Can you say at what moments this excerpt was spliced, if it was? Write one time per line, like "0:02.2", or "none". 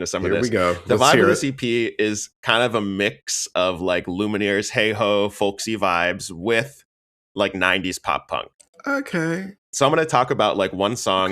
0:09.7